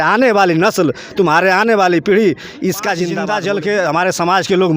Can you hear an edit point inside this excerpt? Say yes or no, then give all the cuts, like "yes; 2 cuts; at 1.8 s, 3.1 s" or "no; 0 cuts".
yes; 1 cut; at 3.2 s